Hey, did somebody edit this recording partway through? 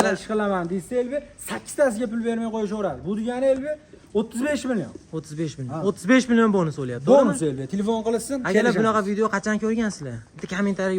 no; 0 cuts

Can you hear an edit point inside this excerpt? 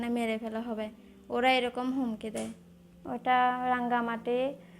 yes; 1 cut; at 3.2 s

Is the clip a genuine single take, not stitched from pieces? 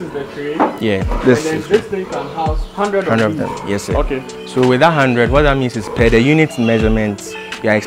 yes; 0 cuts

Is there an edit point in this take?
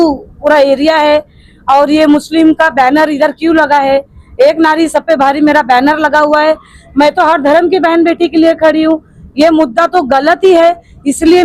no; 0 cuts

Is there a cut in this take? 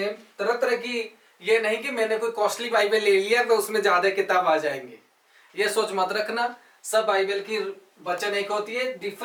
no; 0 cuts

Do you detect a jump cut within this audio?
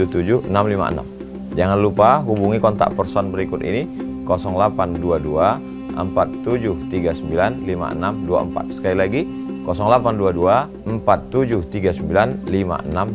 no; 0 cuts

